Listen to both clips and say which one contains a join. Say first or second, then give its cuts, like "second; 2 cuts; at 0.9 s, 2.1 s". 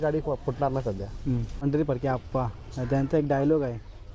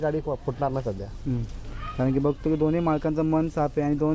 first; 1 cut; at 1.5 s